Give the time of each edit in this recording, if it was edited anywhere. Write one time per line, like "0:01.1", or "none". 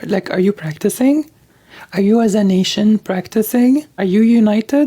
0:03.9